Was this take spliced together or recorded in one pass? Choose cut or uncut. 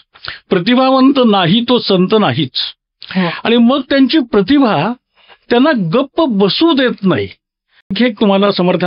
cut